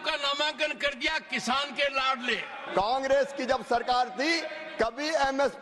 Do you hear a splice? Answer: yes; 1 cut; at 2.6 s

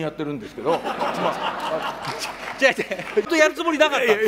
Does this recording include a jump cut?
yes; 1 cut; at 3.3 s

